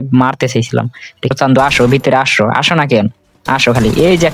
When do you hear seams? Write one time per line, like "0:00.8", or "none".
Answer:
0:01.4